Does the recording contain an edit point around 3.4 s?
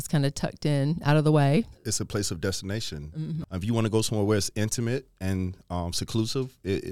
yes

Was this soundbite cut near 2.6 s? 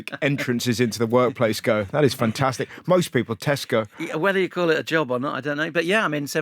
no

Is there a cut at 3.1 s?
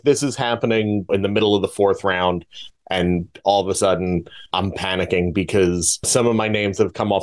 no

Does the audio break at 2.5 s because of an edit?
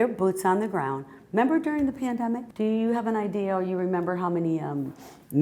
yes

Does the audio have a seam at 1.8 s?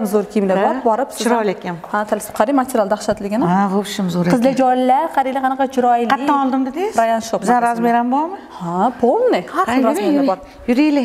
no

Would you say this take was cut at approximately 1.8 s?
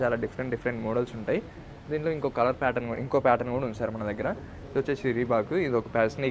no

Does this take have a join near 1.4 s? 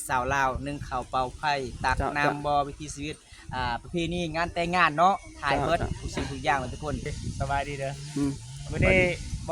no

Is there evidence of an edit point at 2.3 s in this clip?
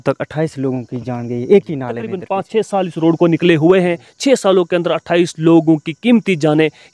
yes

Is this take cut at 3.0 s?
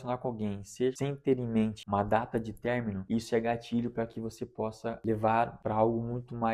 yes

